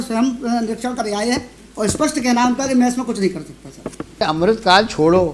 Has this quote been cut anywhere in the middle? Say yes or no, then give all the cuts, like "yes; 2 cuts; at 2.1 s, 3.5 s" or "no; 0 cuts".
yes; 1 cut; at 4.2 s